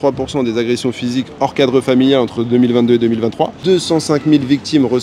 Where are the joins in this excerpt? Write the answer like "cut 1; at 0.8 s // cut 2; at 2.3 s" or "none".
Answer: cut 1; at 3.6 s